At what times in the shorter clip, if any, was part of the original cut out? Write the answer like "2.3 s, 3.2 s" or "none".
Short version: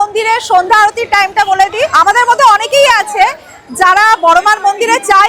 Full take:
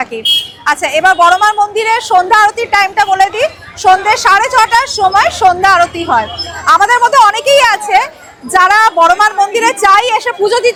1.9 s